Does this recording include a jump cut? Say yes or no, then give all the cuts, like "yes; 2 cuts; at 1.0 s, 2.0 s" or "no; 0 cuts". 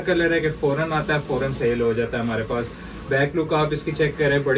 no; 0 cuts